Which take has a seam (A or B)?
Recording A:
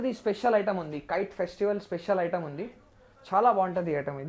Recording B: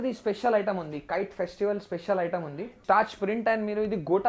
B